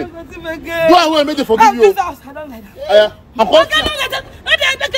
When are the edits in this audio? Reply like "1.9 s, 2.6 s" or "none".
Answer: 3.4 s

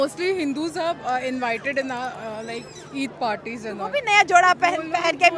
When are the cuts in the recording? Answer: none

